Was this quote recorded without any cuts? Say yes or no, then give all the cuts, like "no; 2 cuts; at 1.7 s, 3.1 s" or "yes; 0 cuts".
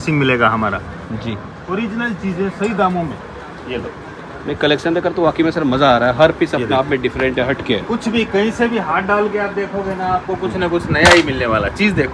yes; 0 cuts